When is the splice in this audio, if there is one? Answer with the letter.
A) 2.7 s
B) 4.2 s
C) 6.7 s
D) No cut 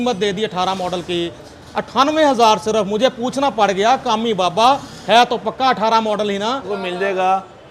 C